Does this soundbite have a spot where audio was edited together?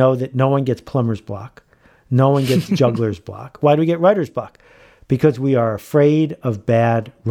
yes; 1 cut; at 3.5 s

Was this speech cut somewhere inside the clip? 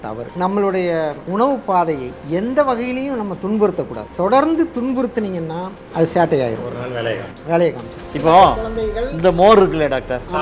yes; 2 cuts; at 1.2 s, 2.1 s

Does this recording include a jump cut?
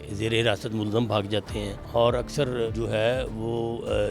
yes; 2 cuts; at 1.8 s, 2.7 s

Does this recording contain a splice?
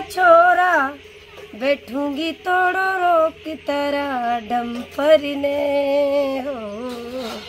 no; 0 cuts

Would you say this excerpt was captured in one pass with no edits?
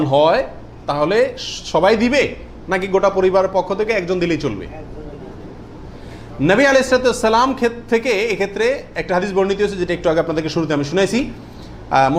yes; 0 cuts

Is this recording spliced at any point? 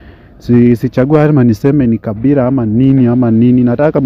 no; 0 cuts

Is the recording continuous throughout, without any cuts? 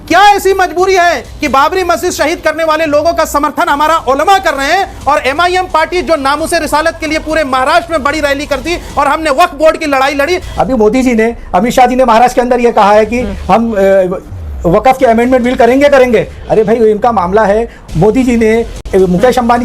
no; 1 cut; at 10.5 s

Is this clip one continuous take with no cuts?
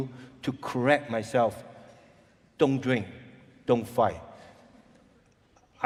yes; 0 cuts

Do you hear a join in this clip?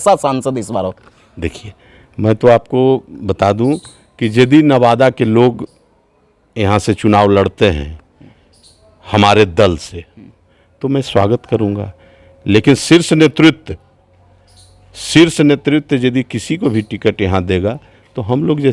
no; 0 cuts

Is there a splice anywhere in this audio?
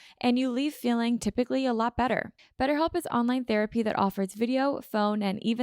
yes; 1 cut; at 2.3 s

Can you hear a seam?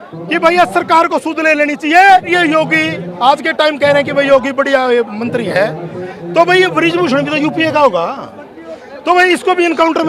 yes; 1 cut; at 2.3 s

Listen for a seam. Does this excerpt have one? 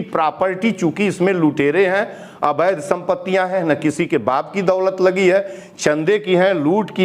no; 0 cuts

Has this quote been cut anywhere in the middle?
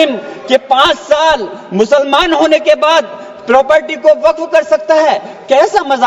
no; 0 cuts

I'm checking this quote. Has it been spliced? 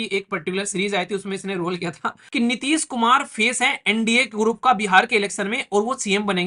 yes; 1 cut; at 2.2 s

